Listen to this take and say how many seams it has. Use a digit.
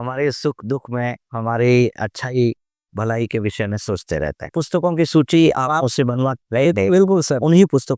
1